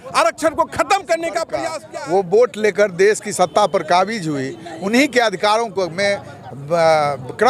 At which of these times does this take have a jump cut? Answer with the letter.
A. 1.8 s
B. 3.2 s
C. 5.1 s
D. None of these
A